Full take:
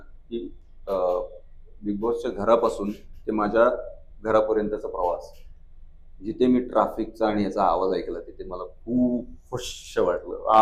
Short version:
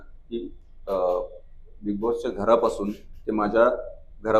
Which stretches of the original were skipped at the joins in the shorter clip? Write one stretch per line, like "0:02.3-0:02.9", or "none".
none